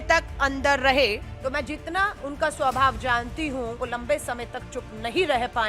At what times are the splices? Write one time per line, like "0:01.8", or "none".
0:01.3
0:03.7